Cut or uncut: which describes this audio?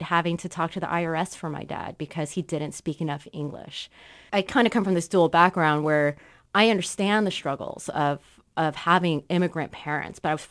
cut